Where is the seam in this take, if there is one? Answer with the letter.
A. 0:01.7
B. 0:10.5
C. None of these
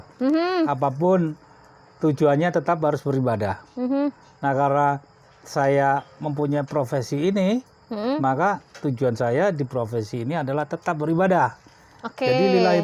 C